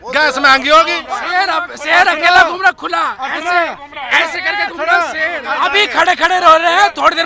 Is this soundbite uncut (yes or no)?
no